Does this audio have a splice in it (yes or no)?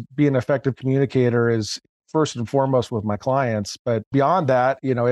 yes